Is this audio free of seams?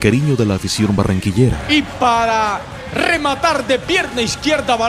no; 1 cut; at 2.8 s

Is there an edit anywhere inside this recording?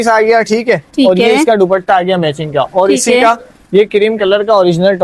no; 0 cuts

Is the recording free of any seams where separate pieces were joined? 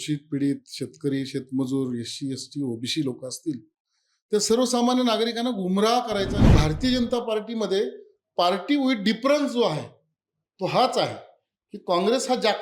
no; 1 cut; at 6.5 s

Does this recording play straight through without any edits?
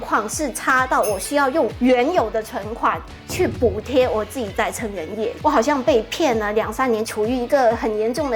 no; 2 cuts; at 5.4 s, 7.1 s

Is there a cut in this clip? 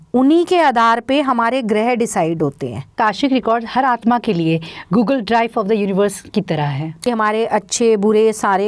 yes; 2 cuts; at 3.0 s, 7.0 s

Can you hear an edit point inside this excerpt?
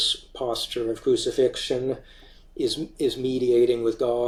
no; 0 cuts

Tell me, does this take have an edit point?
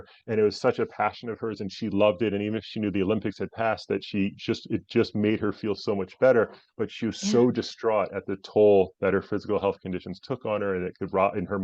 no; 0 cuts

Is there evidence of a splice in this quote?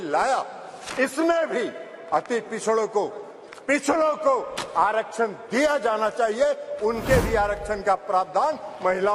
no; 0 cuts

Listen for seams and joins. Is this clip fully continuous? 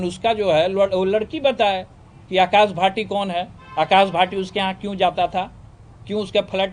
yes; 0 cuts

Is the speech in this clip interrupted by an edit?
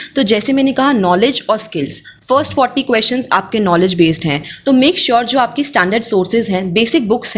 no; 0 cuts

